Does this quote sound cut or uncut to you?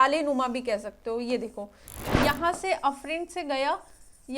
cut